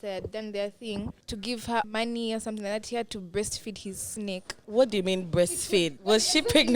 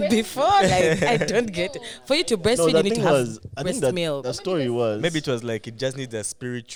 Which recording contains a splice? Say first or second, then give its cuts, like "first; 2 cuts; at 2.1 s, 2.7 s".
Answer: first; 3 cuts; at 1.6 s, 4.6 s, 6.0 s